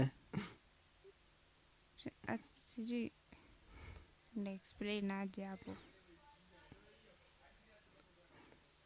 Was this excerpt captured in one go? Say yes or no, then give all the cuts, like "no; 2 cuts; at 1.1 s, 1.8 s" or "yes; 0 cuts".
yes; 0 cuts